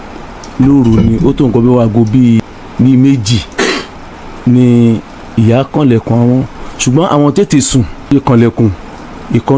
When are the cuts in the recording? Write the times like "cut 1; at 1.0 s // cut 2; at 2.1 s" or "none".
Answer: cut 1; at 2.4 s // cut 2; at 8.1 s